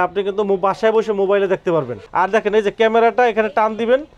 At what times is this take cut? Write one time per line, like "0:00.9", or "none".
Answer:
0:02.0